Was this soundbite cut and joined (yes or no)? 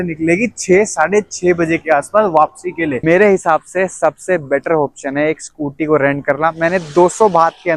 yes